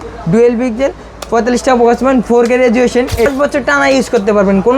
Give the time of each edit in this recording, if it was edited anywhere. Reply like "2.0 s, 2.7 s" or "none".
3.3 s